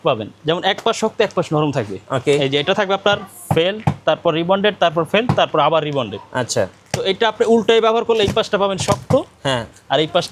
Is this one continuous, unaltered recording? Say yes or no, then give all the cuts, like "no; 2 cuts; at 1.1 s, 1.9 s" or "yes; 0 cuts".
yes; 0 cuts